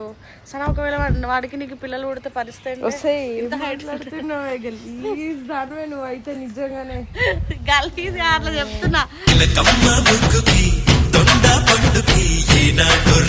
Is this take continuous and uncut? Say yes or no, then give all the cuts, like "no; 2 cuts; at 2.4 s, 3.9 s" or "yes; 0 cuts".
yes; 0 cuts